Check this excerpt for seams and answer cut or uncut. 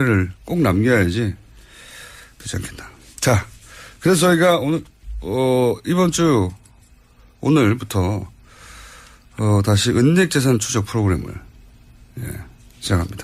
uncut